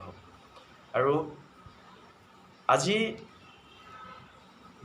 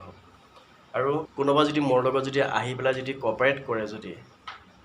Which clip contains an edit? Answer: second; 1 cut; at 1.3 s

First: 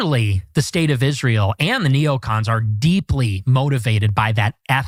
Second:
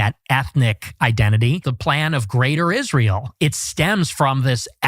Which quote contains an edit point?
second; 2 cuts; at 1.7 s, 3.3 s

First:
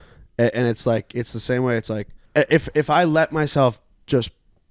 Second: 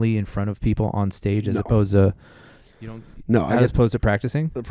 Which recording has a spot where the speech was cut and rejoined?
first; 1 cut; at 2.2 s

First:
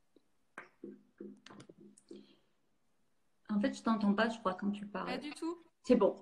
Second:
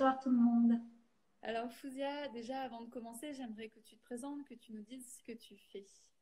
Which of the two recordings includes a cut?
first; 1 cut; at 3.6 s

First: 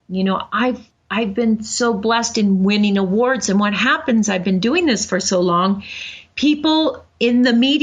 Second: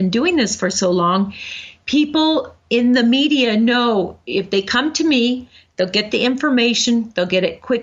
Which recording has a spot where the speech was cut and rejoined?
first; 1 cut; at 0.9 s

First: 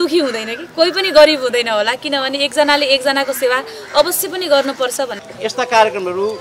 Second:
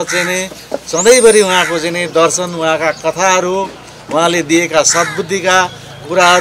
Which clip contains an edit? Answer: first; 1 cut; at 5.2 s

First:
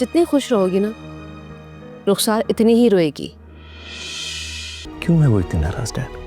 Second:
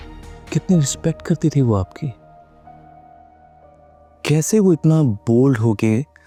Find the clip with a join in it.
first; 1 cut; at 4.8 s

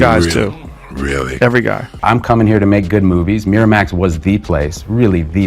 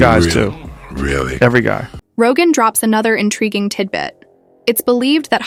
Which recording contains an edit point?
first; 1 cut; at 1.9 s

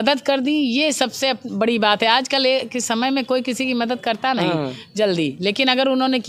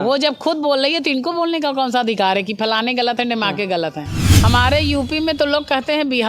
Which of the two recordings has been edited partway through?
second; 1 cut; at 4.3 s

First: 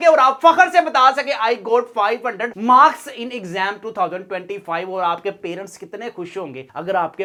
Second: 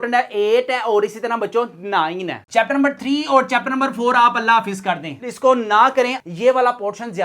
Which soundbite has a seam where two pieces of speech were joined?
second; 2 cuts; at 2.4 s, 6.2 s

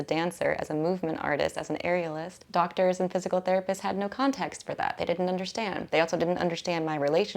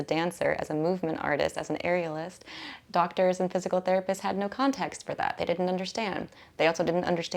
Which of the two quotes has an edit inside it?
first; 2 cuts; at 2.3 s, 5.8 s

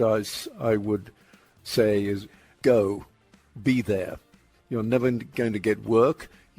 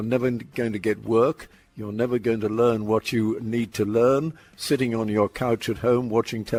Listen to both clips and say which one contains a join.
first; 1 cut; at 2.4 s

